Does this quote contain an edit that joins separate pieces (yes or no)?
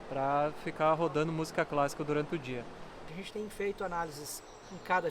yes